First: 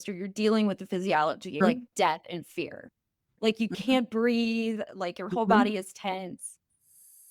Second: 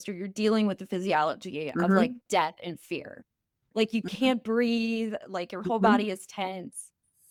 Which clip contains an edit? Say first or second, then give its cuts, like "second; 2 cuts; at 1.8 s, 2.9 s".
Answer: first; 1 cut; at 1.6 s